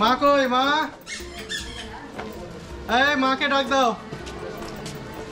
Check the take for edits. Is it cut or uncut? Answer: uncut